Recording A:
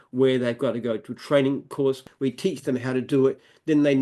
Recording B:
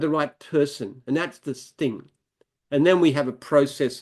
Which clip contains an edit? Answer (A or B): A